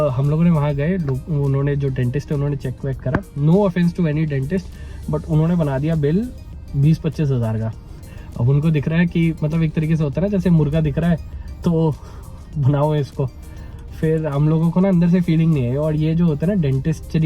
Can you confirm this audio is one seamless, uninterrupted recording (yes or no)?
yes